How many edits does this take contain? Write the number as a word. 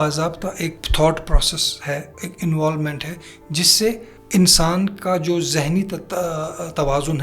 two